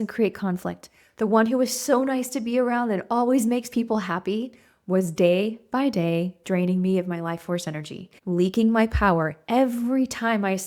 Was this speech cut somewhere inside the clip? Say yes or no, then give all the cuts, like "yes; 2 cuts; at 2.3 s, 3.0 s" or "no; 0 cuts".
no; 0 cuts